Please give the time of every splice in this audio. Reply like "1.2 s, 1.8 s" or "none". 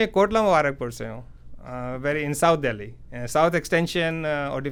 none